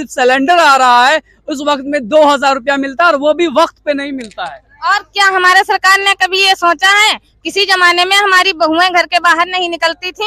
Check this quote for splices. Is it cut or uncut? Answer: uncut